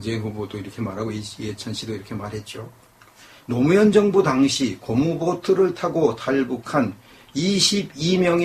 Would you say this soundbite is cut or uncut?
cut